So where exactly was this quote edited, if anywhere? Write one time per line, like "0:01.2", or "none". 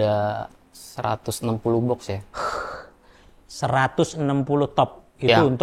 none